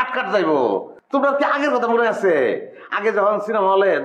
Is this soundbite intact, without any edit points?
no; 1 cut; at 0.9 s

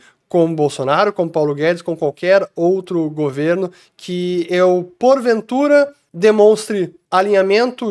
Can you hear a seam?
no; 0 cuts

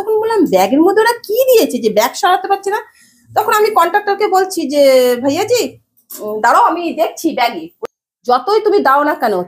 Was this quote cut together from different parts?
yes; 1 cut; at 7.7 s

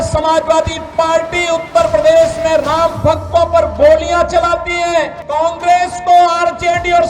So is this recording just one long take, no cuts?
no; 1 cut; at 5.2 s

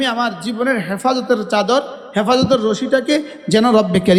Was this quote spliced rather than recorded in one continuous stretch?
no; 0 cuts

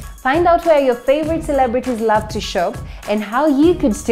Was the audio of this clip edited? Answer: no; 0 cuts

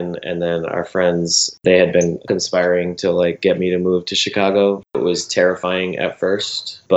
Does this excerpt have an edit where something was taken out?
yes; 3 cuts; at 1.5 s, 2.2 s, 4.9 s

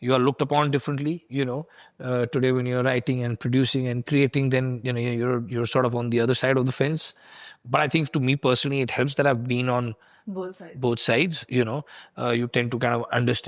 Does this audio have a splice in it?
no; 0 cuts

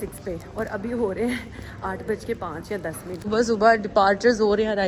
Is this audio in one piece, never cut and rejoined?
no; 1 cut; at 3.3 s

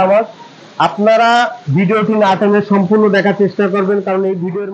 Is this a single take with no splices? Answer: yes; 0 cuts

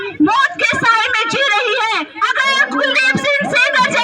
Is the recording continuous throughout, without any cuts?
no; 1 cut; at 2.1 s

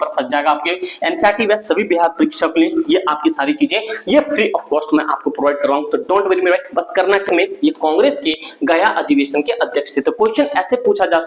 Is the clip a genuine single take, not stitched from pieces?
no; 1 cut; at 7.3 s

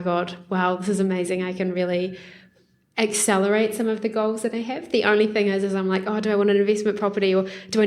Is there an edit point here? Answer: no; 0 cuts

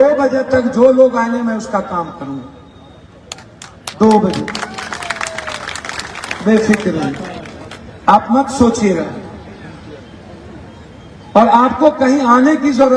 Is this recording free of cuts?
yes; 0 cuts

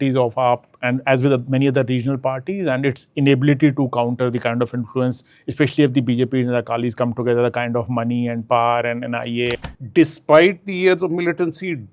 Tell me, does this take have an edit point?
yes; 1 cut; at 9.7 s

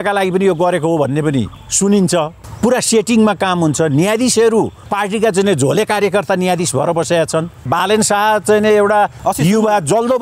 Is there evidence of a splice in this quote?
yes; 5 cuts; at 1.6 s, 2.4 s, 4.8 s, 7.7 s, 9.2 s

